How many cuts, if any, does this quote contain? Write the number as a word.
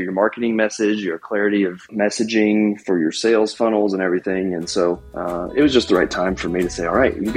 two